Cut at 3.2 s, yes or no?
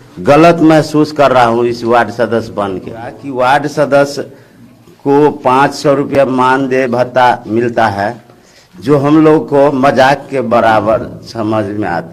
yes